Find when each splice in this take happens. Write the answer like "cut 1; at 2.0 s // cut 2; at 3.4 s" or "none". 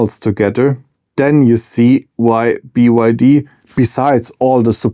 none